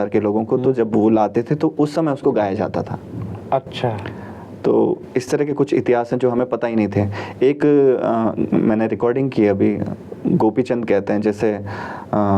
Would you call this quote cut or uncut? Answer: uncut